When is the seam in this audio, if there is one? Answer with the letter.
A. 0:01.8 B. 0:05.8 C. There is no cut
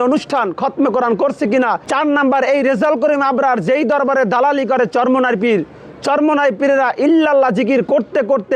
A